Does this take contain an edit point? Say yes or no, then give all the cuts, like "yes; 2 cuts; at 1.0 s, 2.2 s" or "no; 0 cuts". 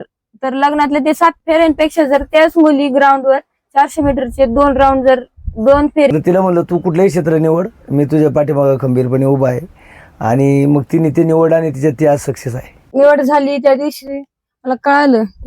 yes; 2 cuts; at 6.1 s, 12.9 s